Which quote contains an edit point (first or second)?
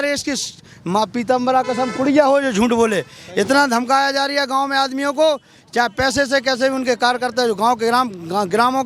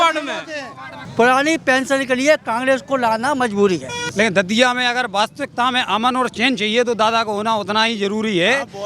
second